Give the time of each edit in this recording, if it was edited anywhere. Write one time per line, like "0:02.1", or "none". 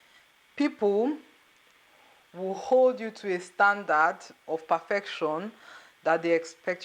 none